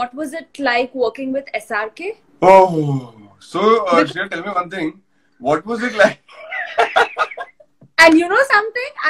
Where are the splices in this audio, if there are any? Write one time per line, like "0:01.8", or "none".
0:02.2